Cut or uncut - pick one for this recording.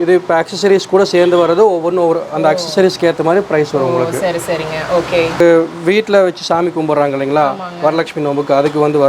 cut